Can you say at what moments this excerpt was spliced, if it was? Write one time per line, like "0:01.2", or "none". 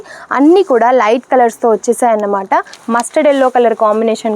0:02.8